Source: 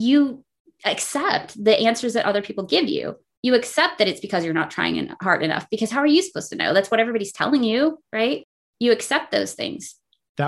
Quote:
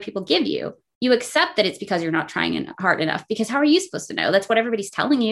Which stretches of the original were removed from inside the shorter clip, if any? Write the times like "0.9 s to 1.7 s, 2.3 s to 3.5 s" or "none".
none